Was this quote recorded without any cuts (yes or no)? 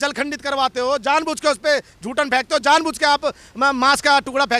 yes